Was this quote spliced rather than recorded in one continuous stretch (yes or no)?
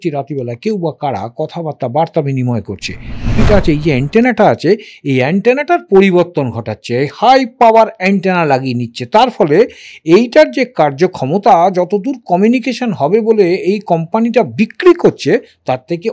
yes